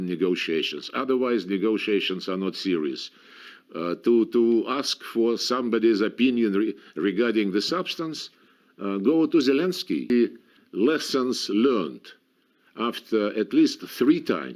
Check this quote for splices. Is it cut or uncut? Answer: cut